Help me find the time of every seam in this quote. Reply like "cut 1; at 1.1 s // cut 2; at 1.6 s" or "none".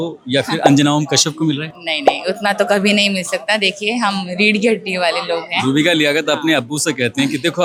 none